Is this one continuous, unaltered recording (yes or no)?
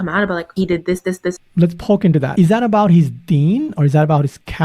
no